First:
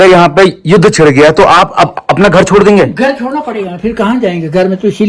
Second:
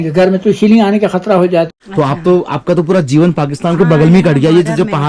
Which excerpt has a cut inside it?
second; 1 cut; at 1.7 s

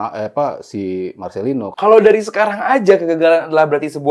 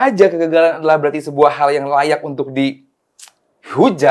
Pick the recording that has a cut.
first; 1 cut; at 1.7 s

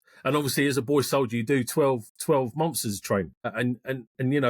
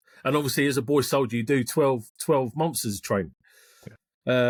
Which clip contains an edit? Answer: first; 1 cut; at 3.5 s

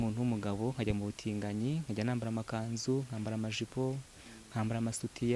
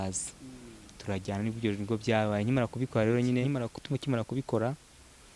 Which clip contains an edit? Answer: second; 1 cut; at 3.5 s

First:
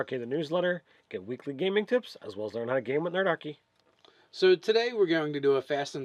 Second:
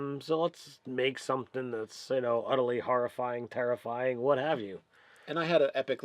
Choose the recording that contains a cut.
second; 1 cut; at 5.1 s

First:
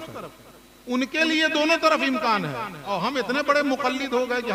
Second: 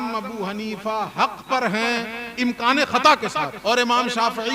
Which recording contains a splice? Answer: second; 1 cut; at 3.5 s

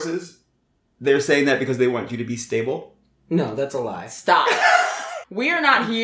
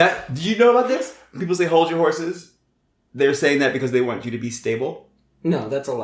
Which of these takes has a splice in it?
first; 1 cut; at 5.0 s

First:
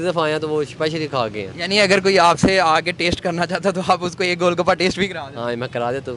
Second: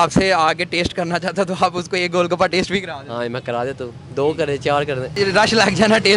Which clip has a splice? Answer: second; 1 cut; at 5.1 s

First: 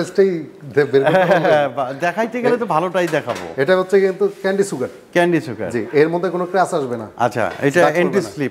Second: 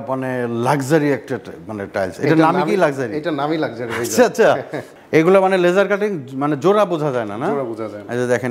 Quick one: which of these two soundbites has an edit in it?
second; 1 cut; at 4.9 s

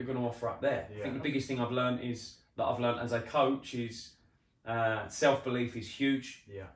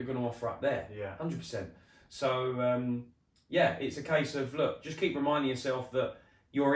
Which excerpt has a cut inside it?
first; 1 cut; at 1.0 s

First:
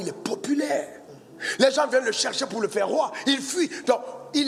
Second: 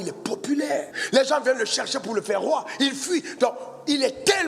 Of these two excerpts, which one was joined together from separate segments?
second; 1 cut; at 1.0 s

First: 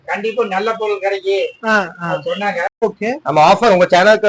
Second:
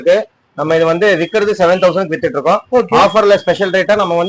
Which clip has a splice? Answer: first; 1 cut; at 2.8 s

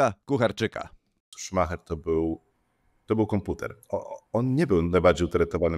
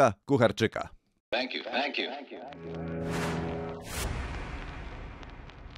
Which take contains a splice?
first; 1 cut; at 1.1 s

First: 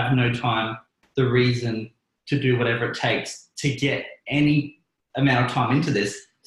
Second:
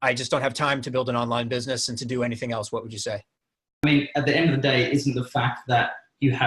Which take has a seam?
second; 1 cut; at 3.8 s

